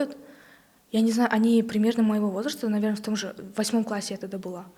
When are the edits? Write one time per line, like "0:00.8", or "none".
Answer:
none